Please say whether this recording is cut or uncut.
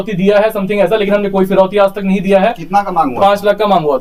uncut